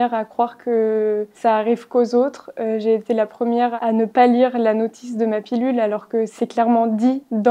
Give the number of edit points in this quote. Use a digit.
2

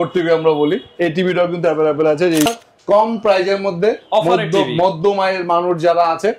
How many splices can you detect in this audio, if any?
1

